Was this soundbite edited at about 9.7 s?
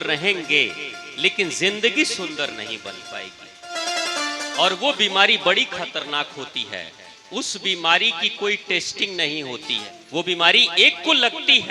yes; 1 cut; at 9.7 s

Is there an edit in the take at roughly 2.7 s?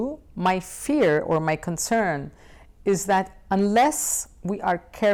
no; 0 cuts

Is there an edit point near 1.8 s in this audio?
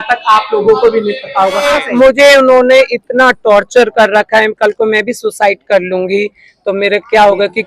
yes; 1 cut; at 1.8 s

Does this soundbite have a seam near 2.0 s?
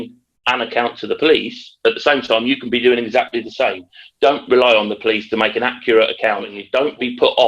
no; 1 cut; at 6.6 s

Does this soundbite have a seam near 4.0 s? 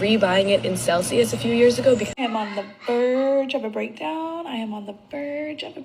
no; 1 cut; at 2.1 s

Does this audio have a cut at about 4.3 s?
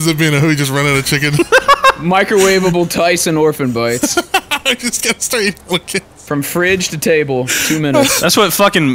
no; 0 cuts

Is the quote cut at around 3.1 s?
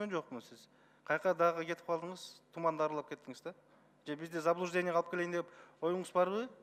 no; 0 cuts

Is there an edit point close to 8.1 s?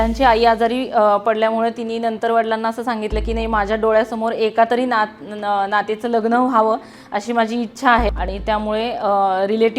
yes; 1 cut; at 8.1 s

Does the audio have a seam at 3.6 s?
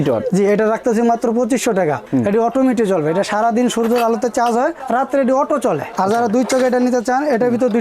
no; 2 cuts; at 2.0 s, 5.9 s

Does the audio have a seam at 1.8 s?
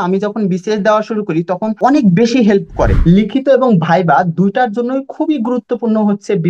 yes; 2 cuts; at 1.8 s, 3.0 s

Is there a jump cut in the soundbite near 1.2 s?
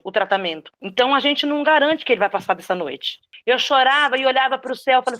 no; 1 cut; at 3.3 s

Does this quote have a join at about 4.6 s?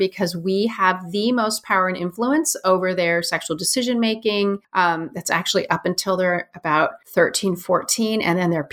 yes; 2 cuts; at 4.6 s, 7.0 s

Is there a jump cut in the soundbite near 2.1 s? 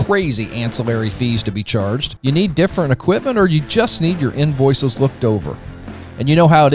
yes; 1 cut; at 2.1 s

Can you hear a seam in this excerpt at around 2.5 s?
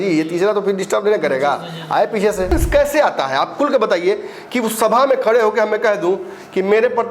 yes; 1 cut; at 2.5 s

